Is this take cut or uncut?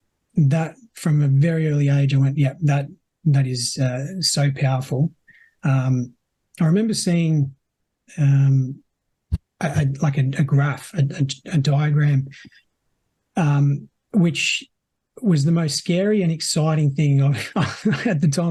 uncut